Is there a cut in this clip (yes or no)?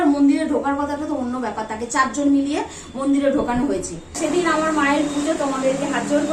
yes